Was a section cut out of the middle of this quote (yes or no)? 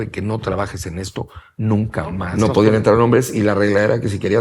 yes